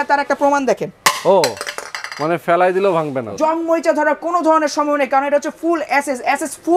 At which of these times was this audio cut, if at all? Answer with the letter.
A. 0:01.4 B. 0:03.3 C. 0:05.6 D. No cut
B